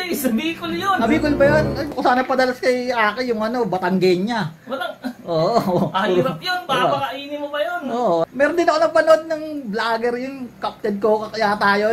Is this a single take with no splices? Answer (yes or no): no